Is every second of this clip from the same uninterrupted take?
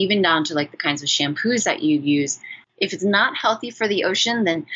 no; 1 cut; at 2.6 s

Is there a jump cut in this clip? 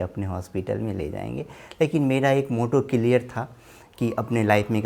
no; 0 cuts

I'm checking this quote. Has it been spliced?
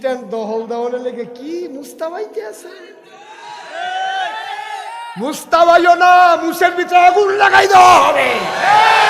no; 0 cuts

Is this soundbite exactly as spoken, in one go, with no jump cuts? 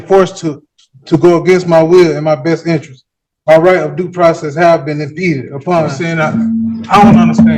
no; 1 cut; at 6.0 s

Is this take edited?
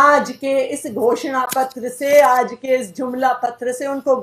no; 0 cuts

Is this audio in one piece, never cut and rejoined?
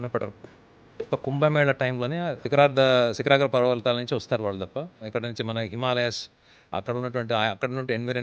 no; 2 cuts; at 2.4 s, 5.0 s

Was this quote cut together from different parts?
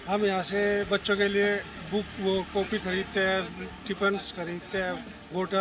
no; 0 cuts

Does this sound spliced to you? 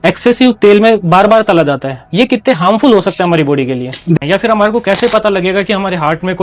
yes; 1 cut; at 4.1 s

